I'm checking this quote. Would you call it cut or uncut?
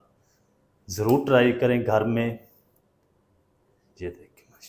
uncut